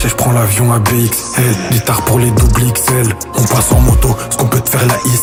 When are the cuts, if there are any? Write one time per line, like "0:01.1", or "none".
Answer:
none

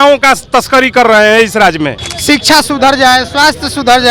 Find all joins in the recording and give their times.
0:02.1

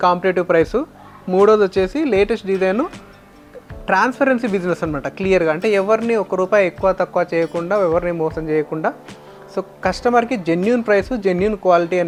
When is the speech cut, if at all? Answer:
none

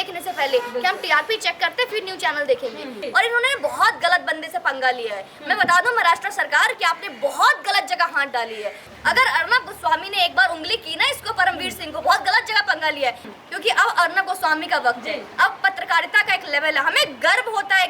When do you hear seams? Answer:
0:03.0
0:08.8
0:13.3

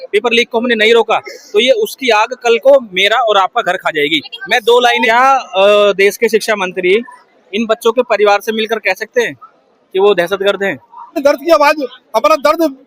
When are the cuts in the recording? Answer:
0:05.0
0:11.2

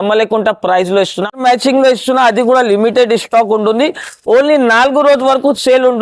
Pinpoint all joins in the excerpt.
0:01.4

